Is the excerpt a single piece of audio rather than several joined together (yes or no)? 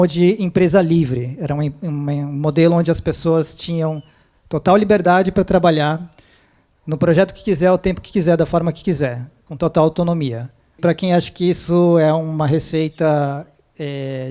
no